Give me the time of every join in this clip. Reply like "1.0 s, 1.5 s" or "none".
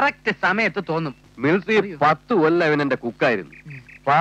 1.2 s